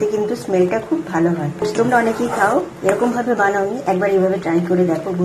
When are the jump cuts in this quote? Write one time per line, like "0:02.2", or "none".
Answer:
0:01.6